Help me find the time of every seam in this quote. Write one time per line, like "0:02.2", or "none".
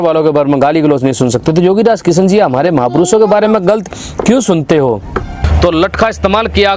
0:05.4